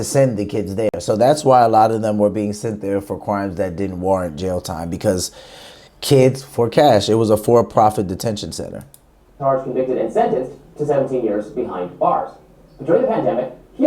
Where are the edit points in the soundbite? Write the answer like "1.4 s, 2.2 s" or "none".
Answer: none